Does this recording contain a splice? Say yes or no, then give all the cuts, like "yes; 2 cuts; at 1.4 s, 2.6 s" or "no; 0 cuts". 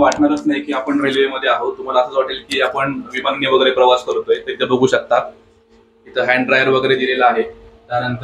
no; 0 cuts